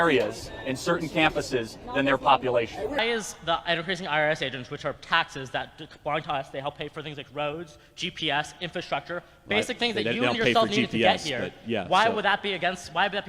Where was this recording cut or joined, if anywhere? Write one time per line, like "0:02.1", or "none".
0:03.0